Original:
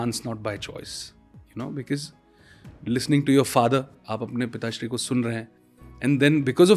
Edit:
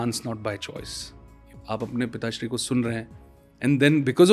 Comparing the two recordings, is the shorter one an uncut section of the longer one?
no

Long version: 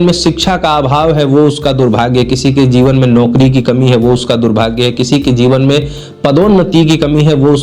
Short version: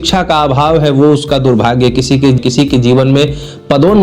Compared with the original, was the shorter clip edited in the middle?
yes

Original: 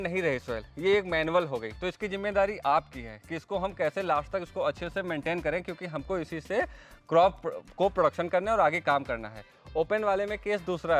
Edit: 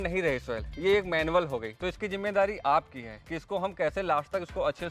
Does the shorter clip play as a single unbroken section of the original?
yes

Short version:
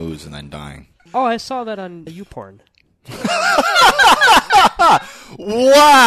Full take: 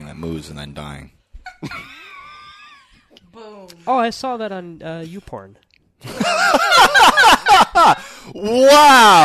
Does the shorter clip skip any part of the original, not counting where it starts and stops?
yes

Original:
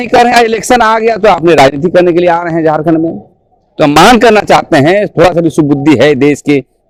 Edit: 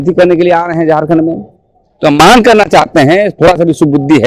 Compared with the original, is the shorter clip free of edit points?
yes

